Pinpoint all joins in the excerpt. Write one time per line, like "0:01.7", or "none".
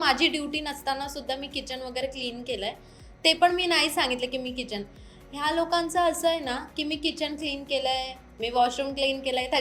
none